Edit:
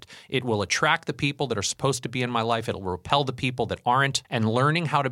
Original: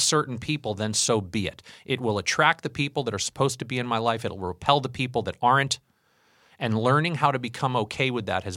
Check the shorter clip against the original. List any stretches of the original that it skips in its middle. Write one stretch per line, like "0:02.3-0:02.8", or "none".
0:05.8-0:06.5